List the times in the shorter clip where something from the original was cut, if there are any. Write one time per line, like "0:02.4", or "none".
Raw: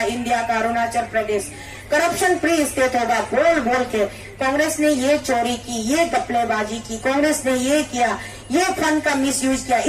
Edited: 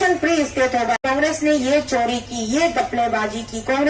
0:01.0